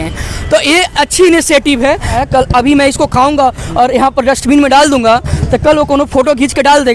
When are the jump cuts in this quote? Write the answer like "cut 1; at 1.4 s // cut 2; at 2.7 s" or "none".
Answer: cut 1; at 2.2 s